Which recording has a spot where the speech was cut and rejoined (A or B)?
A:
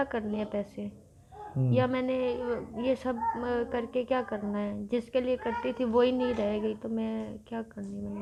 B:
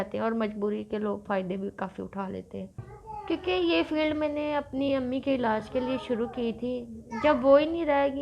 B